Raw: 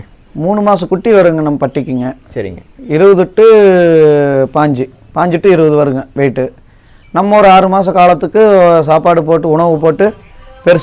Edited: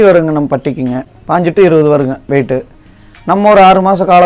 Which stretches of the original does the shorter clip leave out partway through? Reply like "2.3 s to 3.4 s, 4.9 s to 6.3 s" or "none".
2.2 s to 5.0 s